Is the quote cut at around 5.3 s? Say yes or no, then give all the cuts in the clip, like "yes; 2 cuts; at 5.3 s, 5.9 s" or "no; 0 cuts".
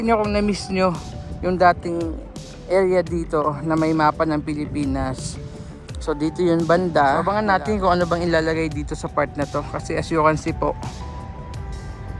no; 1 cut; at 7.3 s